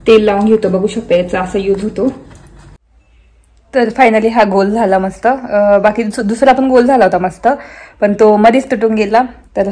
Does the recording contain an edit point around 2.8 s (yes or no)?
yes